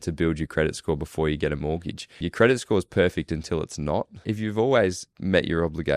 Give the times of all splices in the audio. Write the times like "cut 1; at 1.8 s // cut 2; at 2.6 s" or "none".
cut 1; at 2.2 s // cut 2; at 4.2 s // cut 3; at 5.1 s